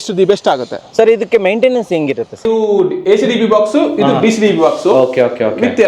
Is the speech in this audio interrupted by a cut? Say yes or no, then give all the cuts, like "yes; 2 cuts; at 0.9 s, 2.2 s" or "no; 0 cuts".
yes; 1 cut; at 2.4 s